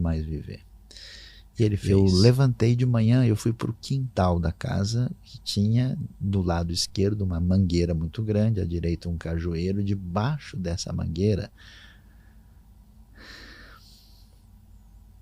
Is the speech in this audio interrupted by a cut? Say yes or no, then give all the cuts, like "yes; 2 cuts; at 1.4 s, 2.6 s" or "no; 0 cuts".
yes; 1 cut; at 1.8 s